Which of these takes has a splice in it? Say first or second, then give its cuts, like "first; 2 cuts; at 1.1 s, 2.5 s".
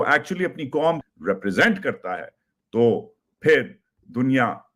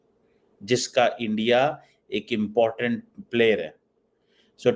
first; 1 cut; at 1.1 s